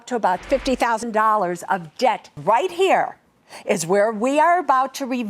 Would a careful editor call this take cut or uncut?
cut